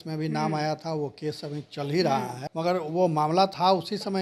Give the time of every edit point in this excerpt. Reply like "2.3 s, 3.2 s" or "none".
2.4 s